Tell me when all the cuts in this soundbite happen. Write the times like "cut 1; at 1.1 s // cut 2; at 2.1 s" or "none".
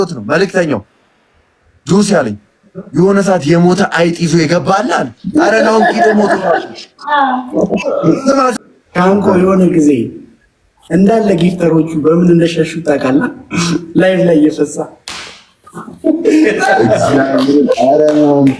cut 1; at 8.5 s